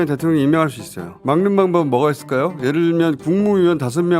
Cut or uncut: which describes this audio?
cut